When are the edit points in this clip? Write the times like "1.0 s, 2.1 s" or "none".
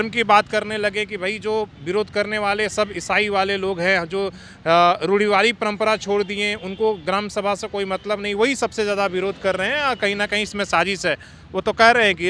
none

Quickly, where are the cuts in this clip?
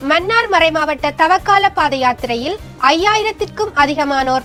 none

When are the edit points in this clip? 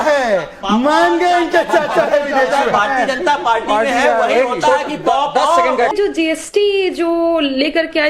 5.9 s

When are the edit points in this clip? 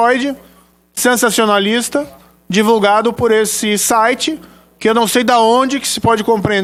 none

